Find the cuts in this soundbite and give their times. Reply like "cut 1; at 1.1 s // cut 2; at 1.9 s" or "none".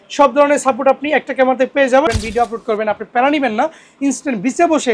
cut 1; at 2.1 s